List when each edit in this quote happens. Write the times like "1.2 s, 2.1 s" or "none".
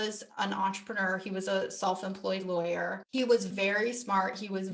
none